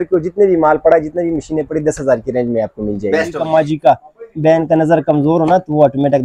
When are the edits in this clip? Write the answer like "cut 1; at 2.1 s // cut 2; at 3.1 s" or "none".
cut 1; at 3.4 s